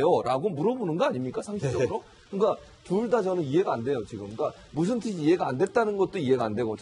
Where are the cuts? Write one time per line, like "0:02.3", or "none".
0:02.4